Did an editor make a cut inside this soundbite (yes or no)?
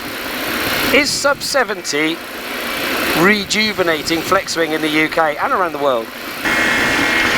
yes